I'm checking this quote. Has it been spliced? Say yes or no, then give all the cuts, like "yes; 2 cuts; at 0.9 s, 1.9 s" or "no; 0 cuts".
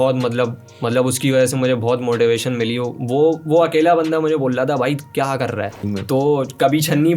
yes; 1 cut; at 5.9 s